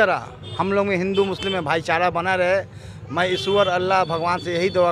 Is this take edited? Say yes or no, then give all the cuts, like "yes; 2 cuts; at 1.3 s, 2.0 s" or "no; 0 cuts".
no; 0 cuts